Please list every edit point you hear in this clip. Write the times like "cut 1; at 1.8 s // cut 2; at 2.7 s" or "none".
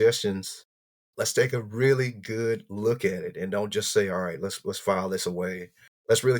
none